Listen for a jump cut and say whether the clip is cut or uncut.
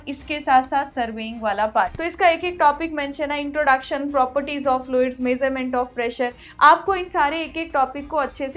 cut